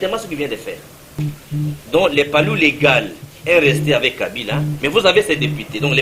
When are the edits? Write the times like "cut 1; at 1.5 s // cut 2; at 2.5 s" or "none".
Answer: cut 1; at 1.2 s

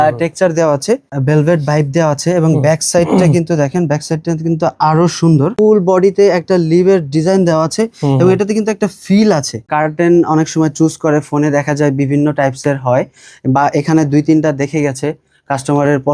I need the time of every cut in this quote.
cut 1; at 1.1 s // cut 2; at 5.5 s // cut 3; at 9.7 s

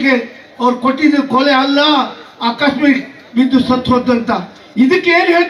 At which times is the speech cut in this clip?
none

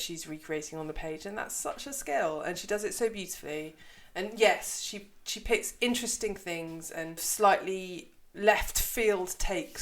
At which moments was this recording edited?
cut 1; at 7.3 s // cut 2; at 8.3 s

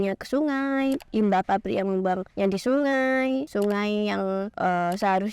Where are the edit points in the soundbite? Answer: cut 1; at 2.3 s // cut 2; at 3.5 s // cut 3; at 4.5 s

